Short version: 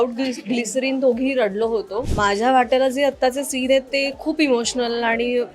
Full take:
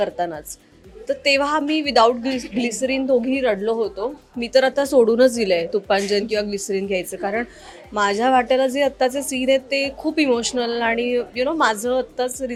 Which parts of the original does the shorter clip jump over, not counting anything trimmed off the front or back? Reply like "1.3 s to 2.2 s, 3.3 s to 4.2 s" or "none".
4.1 s to 7.8 s